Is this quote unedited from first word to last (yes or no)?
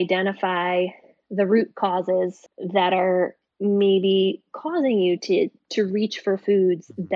yes